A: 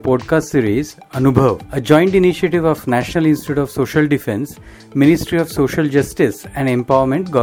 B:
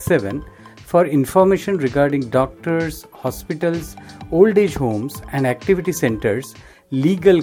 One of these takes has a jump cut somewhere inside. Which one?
A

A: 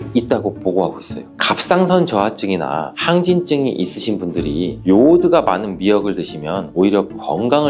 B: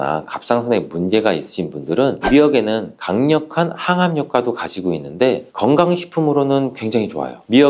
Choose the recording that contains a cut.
B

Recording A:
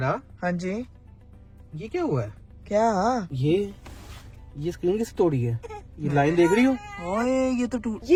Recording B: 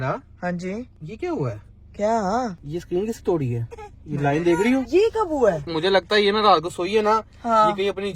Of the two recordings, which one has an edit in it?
B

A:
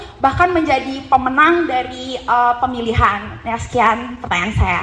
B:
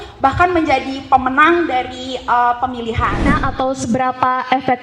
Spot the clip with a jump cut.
B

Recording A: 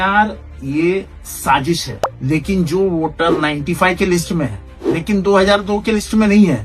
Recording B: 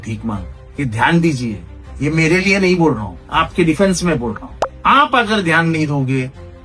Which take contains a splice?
A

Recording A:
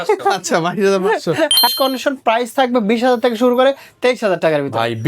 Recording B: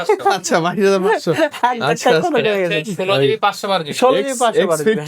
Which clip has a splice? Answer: A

